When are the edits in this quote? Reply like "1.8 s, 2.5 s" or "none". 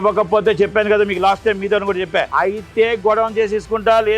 2.3 s